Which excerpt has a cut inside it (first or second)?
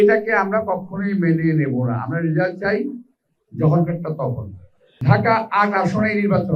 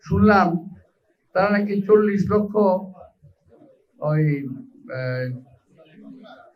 first